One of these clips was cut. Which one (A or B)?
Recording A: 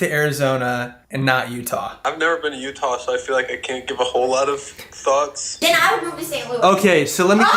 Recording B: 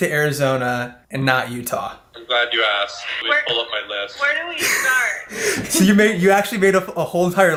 A